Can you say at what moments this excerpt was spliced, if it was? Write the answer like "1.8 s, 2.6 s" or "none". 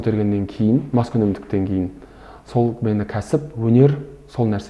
none